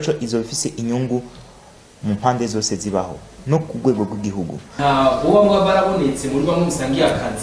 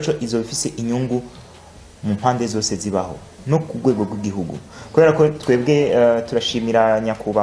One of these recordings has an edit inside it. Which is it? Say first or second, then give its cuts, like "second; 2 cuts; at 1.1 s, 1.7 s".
first; 1 cut; at 4.7 s